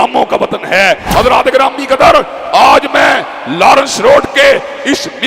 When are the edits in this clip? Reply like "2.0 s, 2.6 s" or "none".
1.0 s

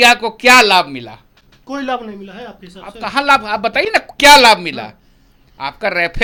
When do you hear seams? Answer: none

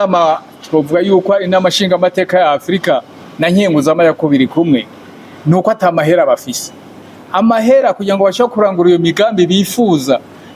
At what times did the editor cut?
none

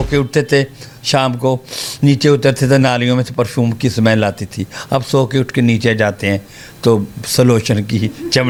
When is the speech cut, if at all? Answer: none

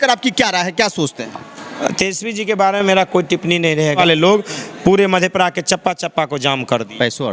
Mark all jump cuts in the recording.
4.0 s

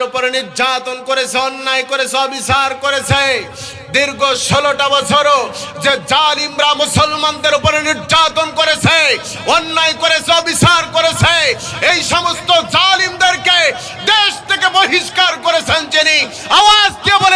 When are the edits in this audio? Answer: none

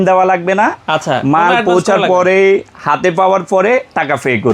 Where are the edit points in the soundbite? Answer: none

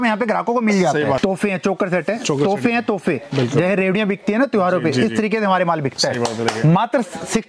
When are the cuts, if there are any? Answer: 1.2 s

